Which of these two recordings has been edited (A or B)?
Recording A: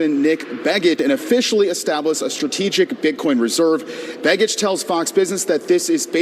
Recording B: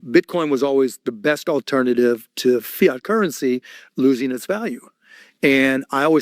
A